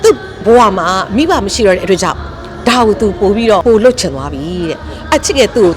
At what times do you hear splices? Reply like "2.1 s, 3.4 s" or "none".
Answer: 3.6 s